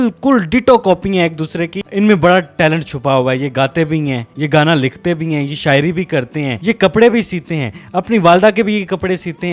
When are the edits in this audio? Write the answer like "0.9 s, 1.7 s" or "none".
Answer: none

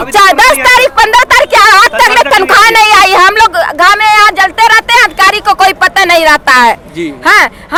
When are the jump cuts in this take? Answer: none

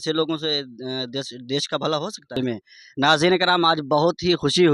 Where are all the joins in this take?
2.2 s

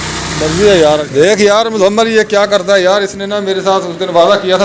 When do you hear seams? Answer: 1.1 s

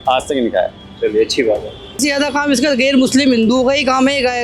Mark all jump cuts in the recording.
2.0 s

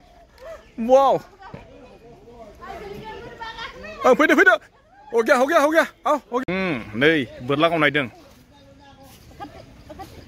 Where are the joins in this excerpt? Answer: 6.4 s

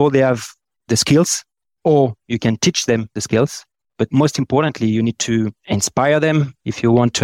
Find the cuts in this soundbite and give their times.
3.1 s

